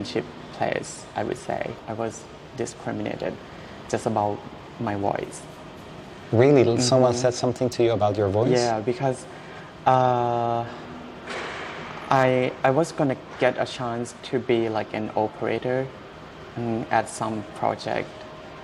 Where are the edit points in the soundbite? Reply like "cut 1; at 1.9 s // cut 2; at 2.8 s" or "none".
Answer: cut 1; at 1.8 s